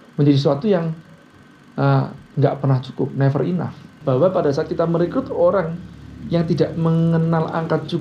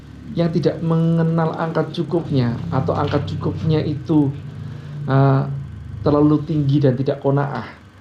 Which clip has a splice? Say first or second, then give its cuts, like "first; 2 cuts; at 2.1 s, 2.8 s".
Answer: first; 1 cut; at 3.9 s